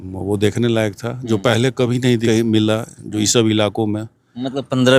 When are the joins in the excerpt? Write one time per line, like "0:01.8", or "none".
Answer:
0:02.2